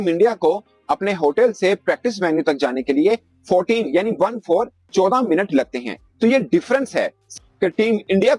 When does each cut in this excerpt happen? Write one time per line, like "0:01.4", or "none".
0:07.4